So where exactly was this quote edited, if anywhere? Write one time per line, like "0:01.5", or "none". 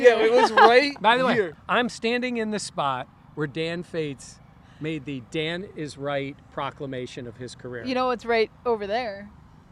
0:01.6